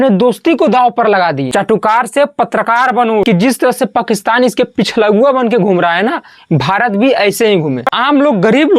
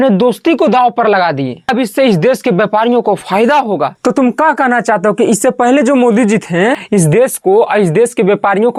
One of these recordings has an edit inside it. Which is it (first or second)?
first